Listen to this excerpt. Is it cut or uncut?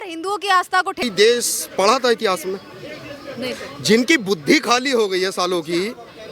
cut